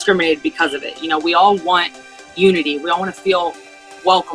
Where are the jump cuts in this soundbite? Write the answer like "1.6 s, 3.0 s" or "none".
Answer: 2.8 s